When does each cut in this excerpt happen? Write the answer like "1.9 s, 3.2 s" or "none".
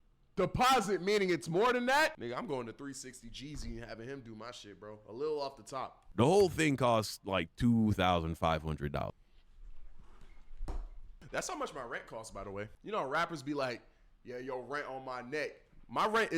2.2 s, 6.0 s, 11.0 s